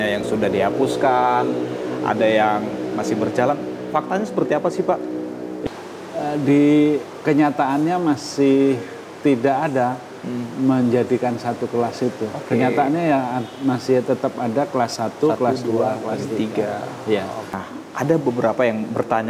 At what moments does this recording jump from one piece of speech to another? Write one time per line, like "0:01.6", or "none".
0:05.6
0:17.6